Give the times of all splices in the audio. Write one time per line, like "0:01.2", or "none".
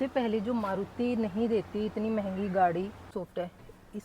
0:03.1